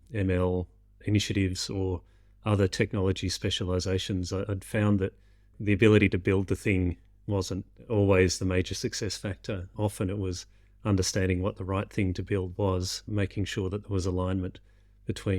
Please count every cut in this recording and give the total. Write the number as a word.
one